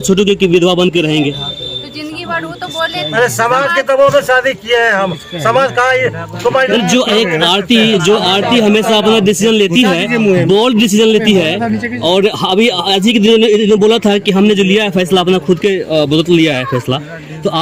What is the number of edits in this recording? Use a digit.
0